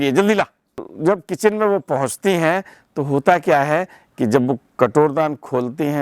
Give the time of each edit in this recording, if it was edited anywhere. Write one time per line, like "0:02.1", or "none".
0:00.9